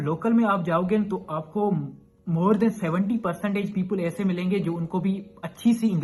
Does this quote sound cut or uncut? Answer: uncut